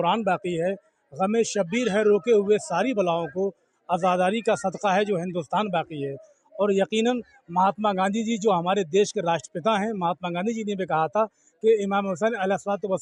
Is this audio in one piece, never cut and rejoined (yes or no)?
yes